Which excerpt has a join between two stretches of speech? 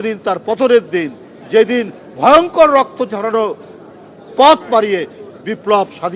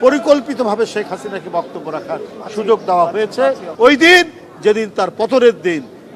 second; 1 cut; at 3.7 s

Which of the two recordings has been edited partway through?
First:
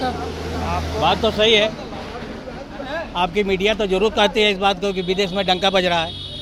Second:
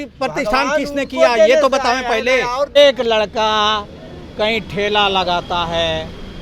second; 1 cut; at 2.8 s

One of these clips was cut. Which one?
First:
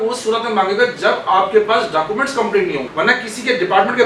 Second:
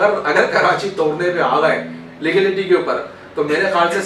first; 1 cut; at 2.9 s

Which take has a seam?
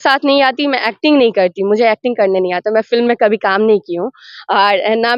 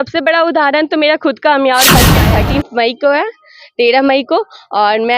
second; 1 cut; at 2.1 s

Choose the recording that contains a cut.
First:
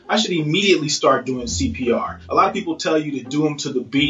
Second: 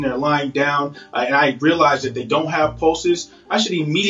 first; 1 cut; at 2.2 s

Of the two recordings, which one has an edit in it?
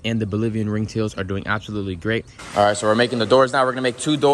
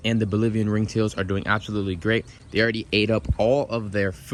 first; 1 cut; at 2.4 s

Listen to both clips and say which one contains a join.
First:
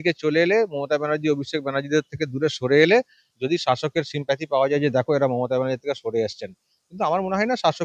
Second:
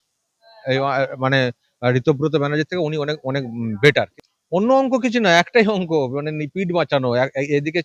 second; 1 cut; at 4.0 s

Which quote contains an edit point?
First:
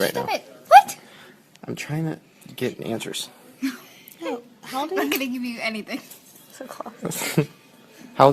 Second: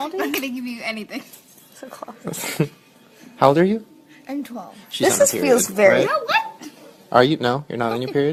first; 1 cut; at 3.3 s

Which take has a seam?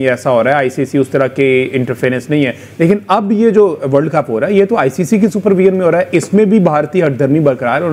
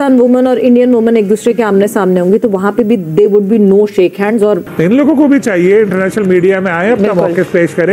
second; 1 cut; at 4.7 s

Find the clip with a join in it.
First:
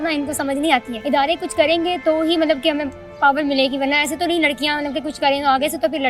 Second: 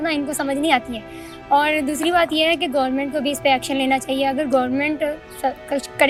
first; 1 cut; at 0.9 s

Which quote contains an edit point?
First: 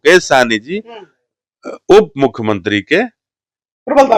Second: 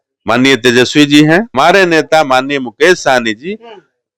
second; 1 cut; at 1.5 s

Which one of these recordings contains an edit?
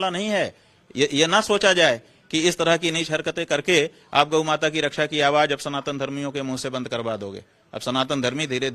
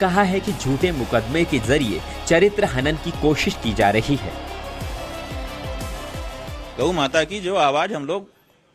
first; 1 cut; at 1.5 s

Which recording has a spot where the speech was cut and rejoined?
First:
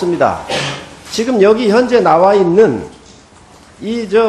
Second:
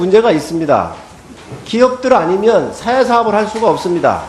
second; 1 cut; at 0.9 s

